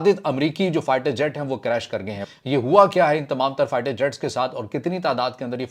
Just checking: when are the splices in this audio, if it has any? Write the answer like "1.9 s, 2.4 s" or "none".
2.2 s